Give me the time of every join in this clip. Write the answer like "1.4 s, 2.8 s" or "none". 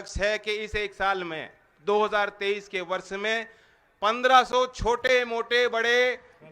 none